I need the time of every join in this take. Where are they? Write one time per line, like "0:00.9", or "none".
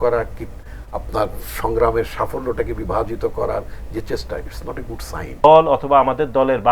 0:05.4